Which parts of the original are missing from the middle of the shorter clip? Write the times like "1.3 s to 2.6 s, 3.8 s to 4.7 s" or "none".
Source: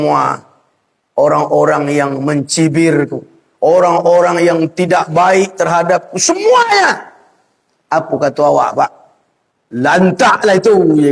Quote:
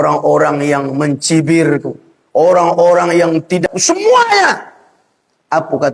4.9 s to 6.0 s